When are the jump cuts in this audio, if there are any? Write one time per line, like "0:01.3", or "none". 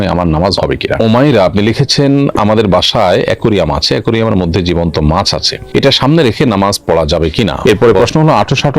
0:01.0
0:07.6